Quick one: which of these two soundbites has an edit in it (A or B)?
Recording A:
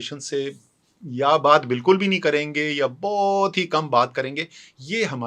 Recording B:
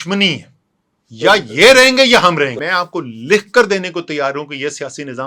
B